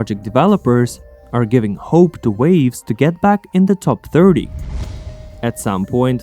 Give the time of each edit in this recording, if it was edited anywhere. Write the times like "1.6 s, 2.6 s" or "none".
4.7 s